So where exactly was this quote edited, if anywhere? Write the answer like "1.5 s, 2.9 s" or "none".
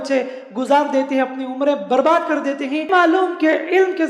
2.9 s